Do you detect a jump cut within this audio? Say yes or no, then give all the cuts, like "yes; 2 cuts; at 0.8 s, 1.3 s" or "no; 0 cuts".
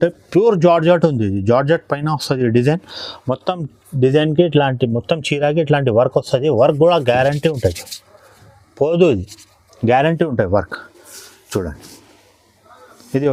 no; 0 cuts